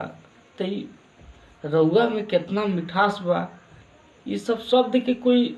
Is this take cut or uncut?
uncut